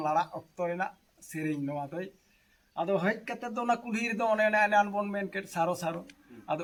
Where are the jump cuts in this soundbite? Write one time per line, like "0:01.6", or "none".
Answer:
none